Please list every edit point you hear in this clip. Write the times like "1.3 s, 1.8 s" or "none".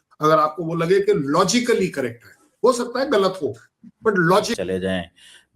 4.6 s